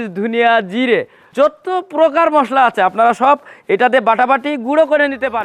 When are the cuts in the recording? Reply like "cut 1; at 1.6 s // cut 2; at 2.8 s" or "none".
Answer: cut 1; at 1.2 s